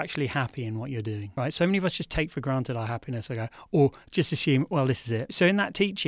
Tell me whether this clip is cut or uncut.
cut